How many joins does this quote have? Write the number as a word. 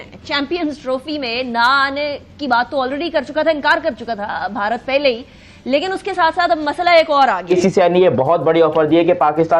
one